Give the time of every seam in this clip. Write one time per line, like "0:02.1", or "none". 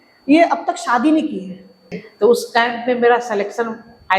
0:02.0